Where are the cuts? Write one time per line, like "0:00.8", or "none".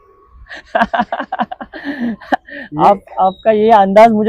none